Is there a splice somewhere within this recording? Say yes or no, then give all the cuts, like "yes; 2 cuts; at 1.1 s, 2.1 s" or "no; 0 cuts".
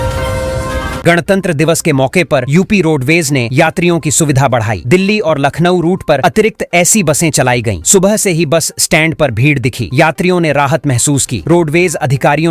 yes; 1 cut; at 1.0 s